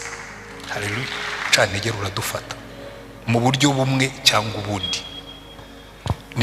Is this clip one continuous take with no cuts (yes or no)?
no